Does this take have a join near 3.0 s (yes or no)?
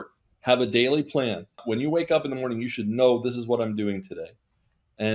no